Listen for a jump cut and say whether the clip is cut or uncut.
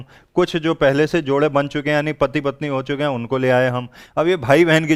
uncut